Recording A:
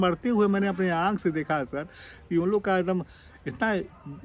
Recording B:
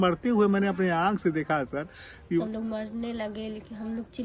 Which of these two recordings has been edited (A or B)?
B